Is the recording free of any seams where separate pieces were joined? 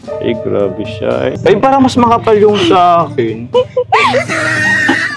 no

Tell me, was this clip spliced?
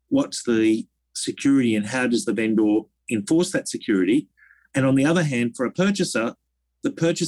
no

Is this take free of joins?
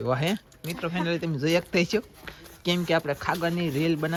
yes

